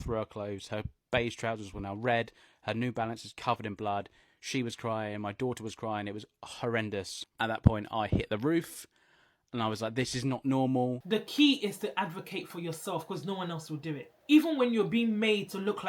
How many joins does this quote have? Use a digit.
3